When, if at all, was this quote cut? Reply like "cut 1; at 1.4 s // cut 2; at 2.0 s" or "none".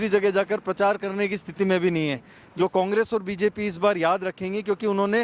cut 1; at 2.4 s

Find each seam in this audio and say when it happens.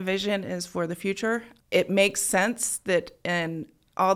cut 1; at 1.5 s

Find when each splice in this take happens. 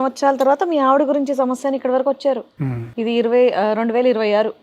none

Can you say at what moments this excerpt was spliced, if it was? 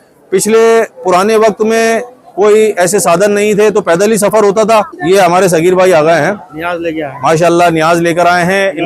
cut 1; at 4.9 s

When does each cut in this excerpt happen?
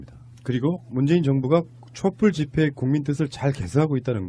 cut 1; at 2.5 s

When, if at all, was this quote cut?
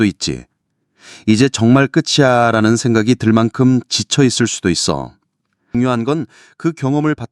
cut 1; at 5.6 s

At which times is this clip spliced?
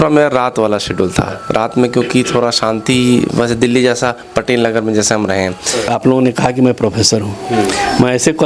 cut 1; at 5.9 s

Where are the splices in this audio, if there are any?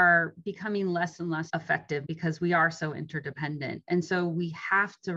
cut 1; at 1.9 s

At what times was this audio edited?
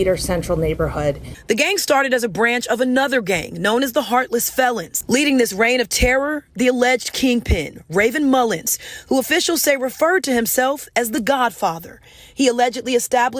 none

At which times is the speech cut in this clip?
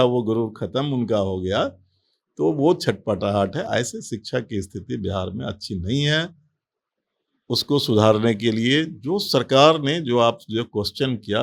none

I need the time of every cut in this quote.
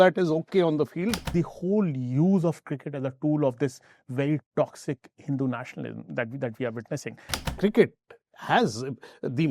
cut 1; at 1.3 s // cut 2; at 7.4 s

